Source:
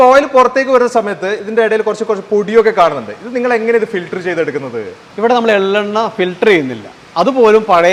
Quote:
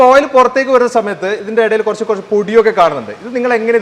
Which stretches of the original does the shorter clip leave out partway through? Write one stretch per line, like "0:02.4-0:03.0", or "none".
none